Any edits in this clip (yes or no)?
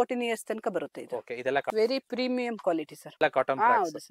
yes